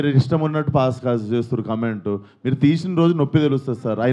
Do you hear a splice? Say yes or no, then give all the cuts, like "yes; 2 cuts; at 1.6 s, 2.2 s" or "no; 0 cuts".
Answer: no; 0 cuts